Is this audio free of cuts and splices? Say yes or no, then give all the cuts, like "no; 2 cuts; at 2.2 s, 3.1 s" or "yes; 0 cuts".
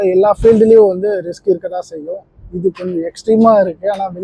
yes; 0 cuts